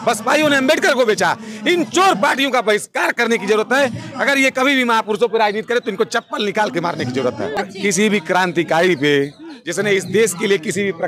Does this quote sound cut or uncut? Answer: cut